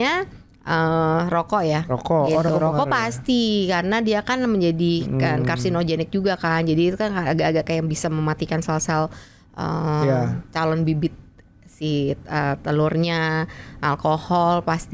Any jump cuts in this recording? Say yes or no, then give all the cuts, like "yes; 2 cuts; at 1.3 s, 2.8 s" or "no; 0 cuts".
no; 0 cuts